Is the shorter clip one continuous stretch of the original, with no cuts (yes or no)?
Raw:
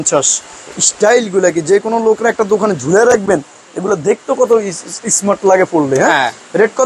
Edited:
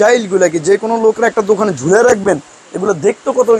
yes